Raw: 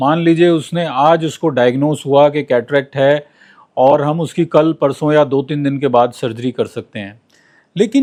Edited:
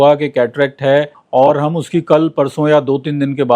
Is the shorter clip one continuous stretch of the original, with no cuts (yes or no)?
no